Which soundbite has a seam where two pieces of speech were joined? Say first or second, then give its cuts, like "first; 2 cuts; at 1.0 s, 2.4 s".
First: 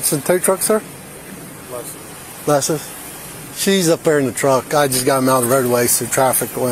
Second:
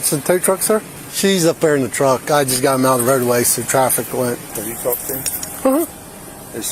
second; 2 cuts; at 1.0 s, 4.5 s